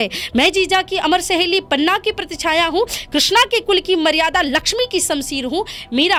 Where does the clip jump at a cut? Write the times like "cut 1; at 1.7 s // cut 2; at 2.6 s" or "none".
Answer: none